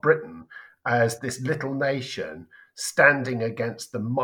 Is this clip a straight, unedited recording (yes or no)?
yes